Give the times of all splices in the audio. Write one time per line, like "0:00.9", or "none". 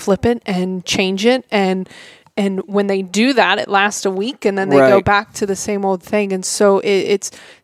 none